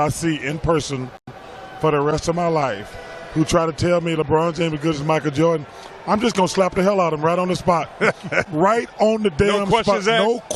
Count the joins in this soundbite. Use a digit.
0